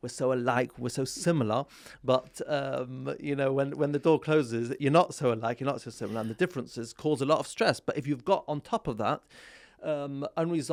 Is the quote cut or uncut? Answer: uncut